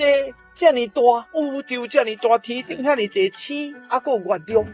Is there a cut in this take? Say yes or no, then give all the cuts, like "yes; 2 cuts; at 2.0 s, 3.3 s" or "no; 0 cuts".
no; 0 cuts